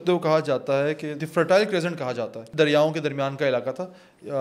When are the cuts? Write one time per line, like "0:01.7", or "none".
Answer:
0:01.2
0:02.5